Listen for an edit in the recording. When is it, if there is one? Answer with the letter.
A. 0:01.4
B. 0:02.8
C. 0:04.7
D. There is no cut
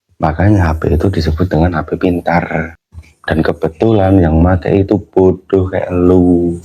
B